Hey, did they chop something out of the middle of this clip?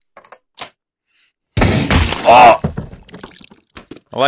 no; 0 cuts

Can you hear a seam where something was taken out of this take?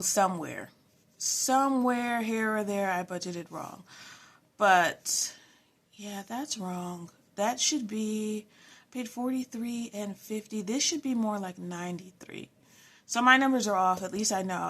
no; 0 cuts

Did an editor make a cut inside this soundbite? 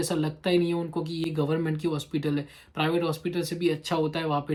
no; 0 cuts

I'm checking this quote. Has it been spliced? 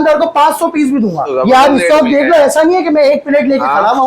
yes; 1 cut; at 1.3 s

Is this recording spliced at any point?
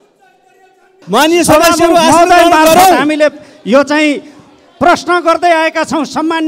yes; 1 cut; at 1.0 s

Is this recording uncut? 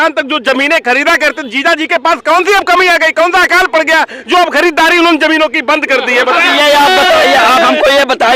yes; 0 cuts

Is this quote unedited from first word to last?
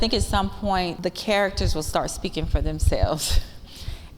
no; 1 cut; at 0.9 s

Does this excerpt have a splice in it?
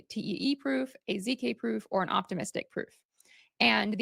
no; 0 cuts

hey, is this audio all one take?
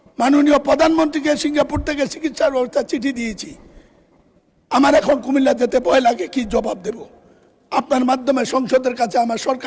yes; 0 cuts

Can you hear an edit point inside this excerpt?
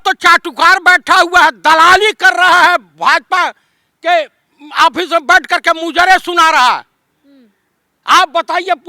no; 0 cuts

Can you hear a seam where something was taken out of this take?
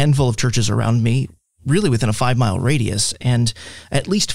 no; 0 cuts

